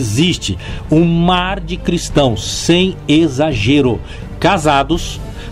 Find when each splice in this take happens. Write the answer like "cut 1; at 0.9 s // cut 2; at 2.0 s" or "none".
cut 1; at 4.1 s